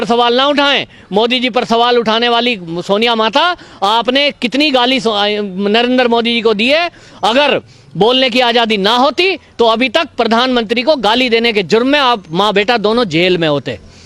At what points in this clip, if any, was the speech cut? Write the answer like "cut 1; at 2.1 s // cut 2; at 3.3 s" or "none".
none